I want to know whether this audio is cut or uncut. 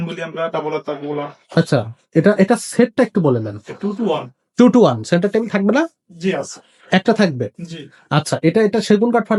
uncut